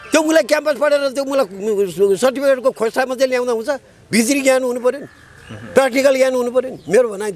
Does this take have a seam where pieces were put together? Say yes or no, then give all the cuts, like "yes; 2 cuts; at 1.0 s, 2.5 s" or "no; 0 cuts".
no; 0 cuts